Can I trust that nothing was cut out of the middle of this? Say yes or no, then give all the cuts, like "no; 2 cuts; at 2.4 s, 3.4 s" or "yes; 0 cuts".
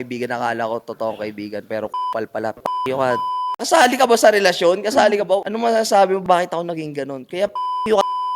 no; 1 cut; at 3.6 s